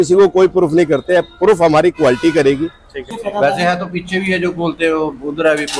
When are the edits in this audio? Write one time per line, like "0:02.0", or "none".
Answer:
0:03.1